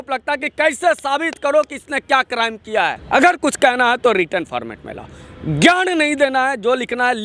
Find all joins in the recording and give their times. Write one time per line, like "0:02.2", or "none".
0:03.0